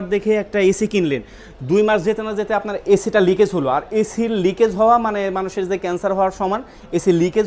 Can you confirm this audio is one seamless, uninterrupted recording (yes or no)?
yes